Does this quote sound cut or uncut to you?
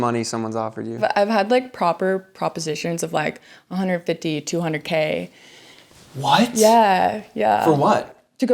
cut